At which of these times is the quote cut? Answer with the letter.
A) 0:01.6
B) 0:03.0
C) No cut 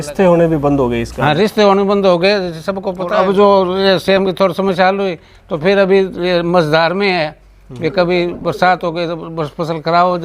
B